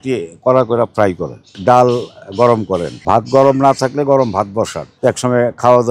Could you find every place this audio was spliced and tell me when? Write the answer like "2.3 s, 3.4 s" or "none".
1.5 s, 2.9 s, 4.8 s